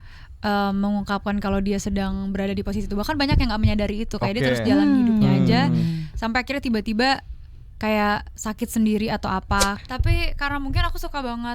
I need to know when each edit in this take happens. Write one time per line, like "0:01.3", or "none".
0:09.8